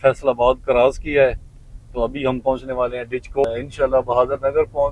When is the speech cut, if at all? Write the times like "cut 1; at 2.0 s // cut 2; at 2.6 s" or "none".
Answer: cut 1; at 3.4 s